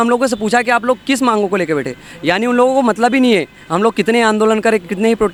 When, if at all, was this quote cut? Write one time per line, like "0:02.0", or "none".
none

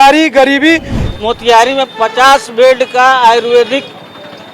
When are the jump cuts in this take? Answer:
0:00.9

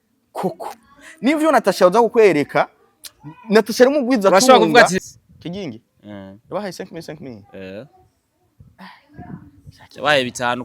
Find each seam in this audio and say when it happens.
0:05.0

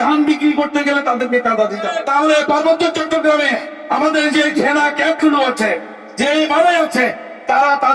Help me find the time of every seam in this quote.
0:01.9

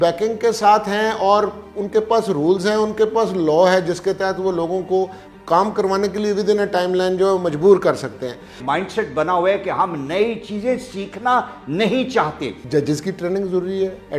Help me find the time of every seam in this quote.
0:08.6
0:12.6

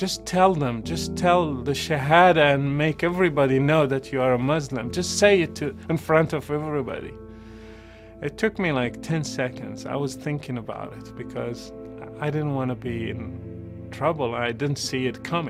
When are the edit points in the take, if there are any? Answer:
none

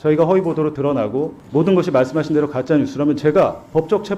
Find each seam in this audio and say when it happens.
0:01.4

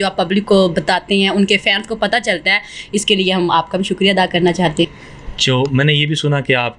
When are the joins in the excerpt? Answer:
0:04.9

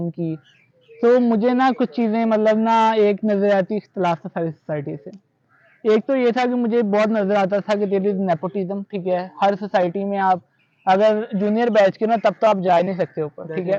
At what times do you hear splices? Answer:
none

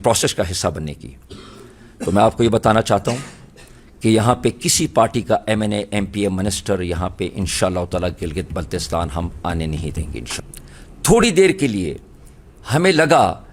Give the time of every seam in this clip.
0:10.3

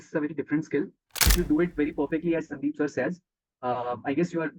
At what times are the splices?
0:01.2

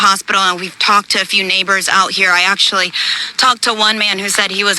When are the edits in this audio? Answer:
0:03.5

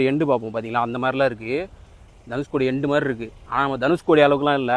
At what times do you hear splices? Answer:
none

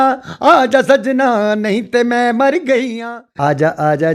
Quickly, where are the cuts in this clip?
0:03.0

